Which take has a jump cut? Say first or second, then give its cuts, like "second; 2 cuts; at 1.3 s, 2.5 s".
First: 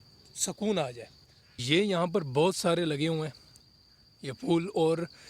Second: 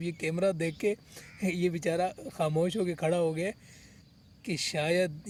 first; 1 cut; at 1.6 s